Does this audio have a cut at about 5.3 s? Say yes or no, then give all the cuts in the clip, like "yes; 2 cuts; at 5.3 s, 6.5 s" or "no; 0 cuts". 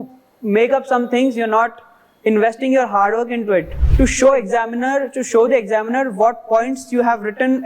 no; 1 cut; at 3.8 s